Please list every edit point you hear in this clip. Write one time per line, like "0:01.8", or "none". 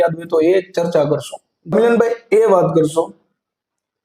0:01.7